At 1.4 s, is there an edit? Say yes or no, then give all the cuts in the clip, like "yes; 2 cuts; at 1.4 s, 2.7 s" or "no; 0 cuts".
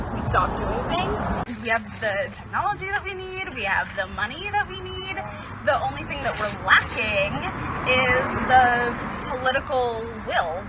yes; 1 cut; at 1.4 s